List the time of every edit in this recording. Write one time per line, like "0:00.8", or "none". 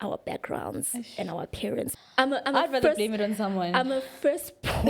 0:01.9